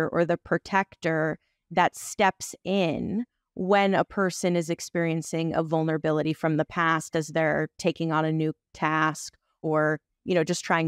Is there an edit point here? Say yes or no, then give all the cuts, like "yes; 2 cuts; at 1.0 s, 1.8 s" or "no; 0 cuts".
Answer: yes; 1 cut; at 9.5 s